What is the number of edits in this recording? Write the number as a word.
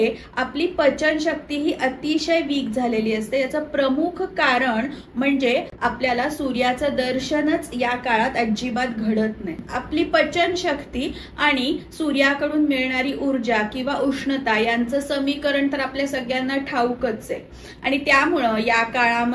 zero